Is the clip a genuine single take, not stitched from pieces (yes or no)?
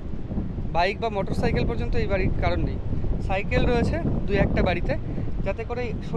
yes